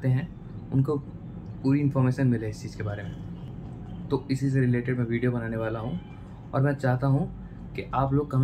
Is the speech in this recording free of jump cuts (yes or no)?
yes